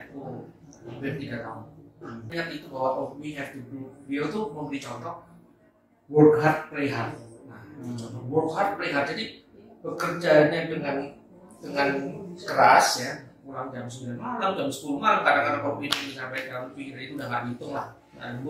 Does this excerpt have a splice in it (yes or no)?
yes